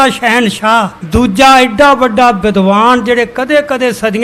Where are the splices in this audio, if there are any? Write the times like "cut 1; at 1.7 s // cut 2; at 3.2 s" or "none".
cut 1; at 1.0 s